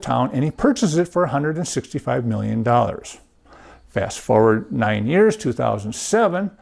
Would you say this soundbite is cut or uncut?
uncut